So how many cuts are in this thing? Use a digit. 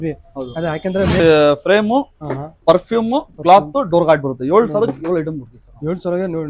1